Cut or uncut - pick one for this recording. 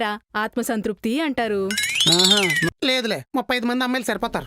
cut